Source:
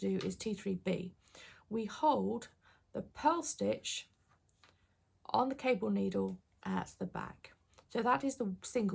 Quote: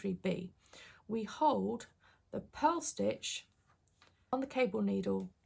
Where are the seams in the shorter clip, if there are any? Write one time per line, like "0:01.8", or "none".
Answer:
0:04.3